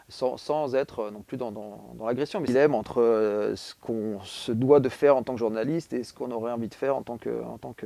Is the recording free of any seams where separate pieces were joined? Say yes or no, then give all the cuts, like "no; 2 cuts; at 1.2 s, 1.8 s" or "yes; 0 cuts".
no; 1 cut; at 2.4 s